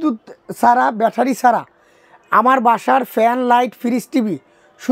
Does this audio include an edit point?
no; 0 cuts

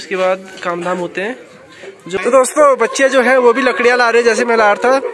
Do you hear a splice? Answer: yes; 1 cut; at 2.2 s

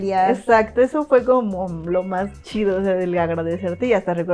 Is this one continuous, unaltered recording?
yes; 0 cuts

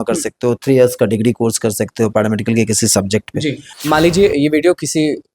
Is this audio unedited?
no; 1 cut; at 3.7 s

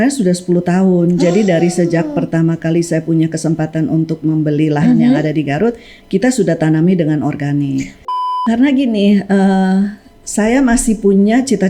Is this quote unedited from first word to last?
no; 1 cut; at 8.3 s

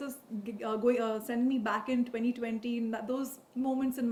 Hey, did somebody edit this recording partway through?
no; 0 cuts

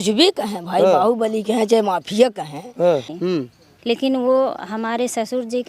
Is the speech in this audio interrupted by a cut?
yes; 1 cut; at 3.1 s

